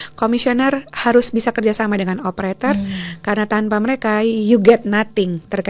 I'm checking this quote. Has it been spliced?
no; 0 cuts

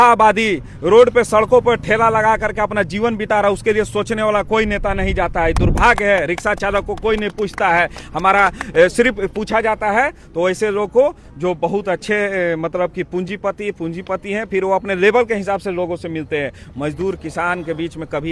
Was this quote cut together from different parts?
no; 0 cuts

